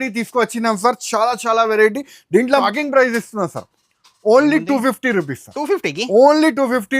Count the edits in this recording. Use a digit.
1